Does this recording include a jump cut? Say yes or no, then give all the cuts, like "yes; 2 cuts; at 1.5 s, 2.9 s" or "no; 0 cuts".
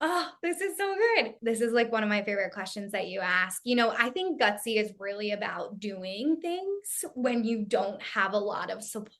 yes; 1 cut; at 1.3 s